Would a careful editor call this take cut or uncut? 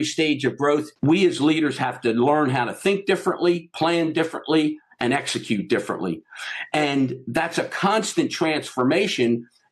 cut